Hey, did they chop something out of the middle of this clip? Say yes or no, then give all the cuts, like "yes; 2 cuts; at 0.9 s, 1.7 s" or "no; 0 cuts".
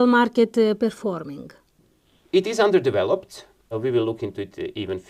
yes; 1 cut; at 3.7 s